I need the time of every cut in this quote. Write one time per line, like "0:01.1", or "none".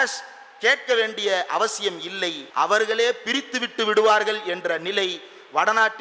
0:02.4